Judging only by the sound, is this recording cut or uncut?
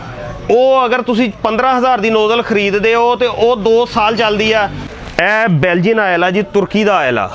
cut